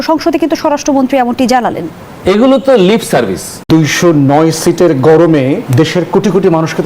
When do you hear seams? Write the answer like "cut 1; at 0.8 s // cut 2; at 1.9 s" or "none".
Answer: cut 1; at 3.5 s // cut 2; at 5.7 s